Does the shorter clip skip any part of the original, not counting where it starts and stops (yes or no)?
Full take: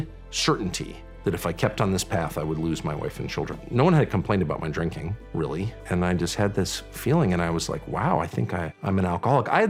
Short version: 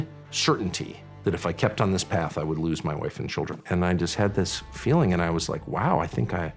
yes